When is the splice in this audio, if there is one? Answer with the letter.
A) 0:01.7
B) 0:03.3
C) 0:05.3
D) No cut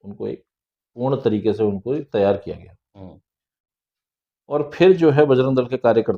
D